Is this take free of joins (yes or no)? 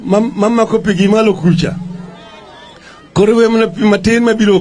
yes